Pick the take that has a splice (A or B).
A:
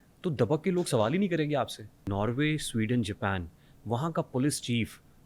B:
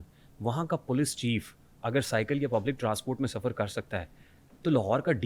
A